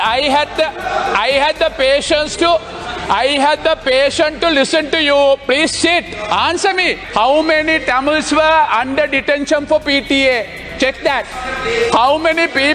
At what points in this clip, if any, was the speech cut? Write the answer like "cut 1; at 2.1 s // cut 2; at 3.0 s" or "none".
cut 1; at 7.0 s